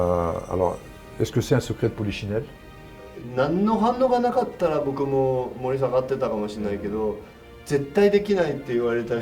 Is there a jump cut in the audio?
yes; 1 cut; at 2.9 s

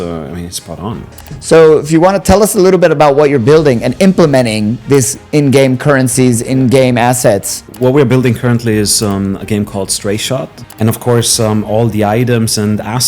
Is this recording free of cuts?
no; 3 cuts; at 1.2 s, 7.6 s, 10.6 s

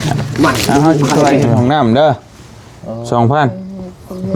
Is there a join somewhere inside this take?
yes; 1 cut; at 1.6 s

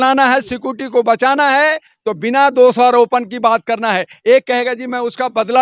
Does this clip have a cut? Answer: no; 0 cuts

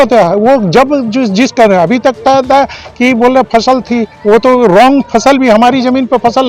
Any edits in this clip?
no; 0 cuts

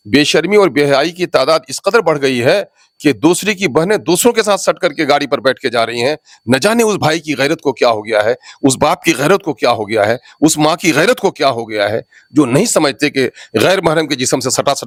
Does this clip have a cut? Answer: no; 0 cuts

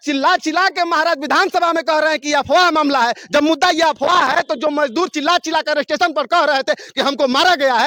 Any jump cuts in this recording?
no; 0 cuts

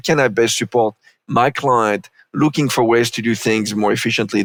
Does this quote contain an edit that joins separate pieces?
no; 0 cuts

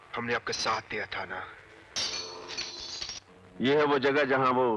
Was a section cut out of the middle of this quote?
yes; 1 cut; at 2.0 s

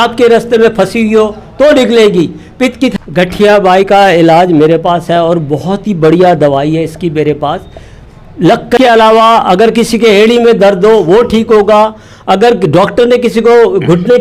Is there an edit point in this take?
yes; 2 cuts; at 2.9 s, 8.8 s

